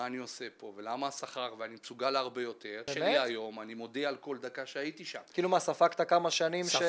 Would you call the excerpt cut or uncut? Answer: cut